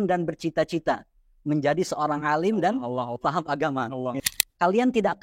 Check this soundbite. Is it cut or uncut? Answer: cut